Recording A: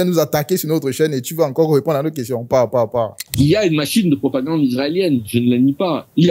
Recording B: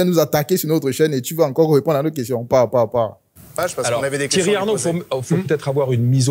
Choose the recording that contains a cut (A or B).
A